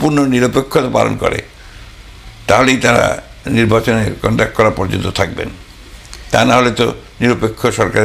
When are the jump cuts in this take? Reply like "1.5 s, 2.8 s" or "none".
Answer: none